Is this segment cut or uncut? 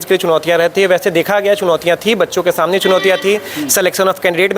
uncut